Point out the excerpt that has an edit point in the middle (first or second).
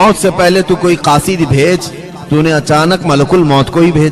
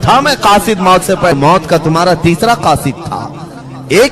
second